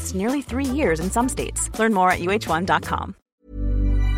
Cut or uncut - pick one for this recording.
cut